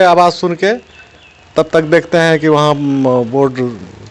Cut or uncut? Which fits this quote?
uncut